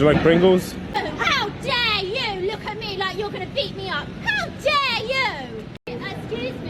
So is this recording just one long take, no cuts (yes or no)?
no